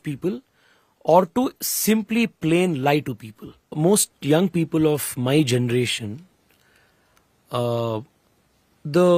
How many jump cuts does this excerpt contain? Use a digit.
1